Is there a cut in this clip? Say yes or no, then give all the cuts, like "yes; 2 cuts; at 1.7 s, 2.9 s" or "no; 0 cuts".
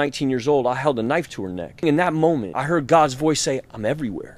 no; 0 cuts